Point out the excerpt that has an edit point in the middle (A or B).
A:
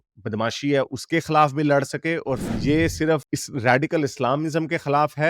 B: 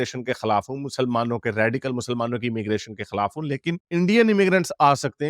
A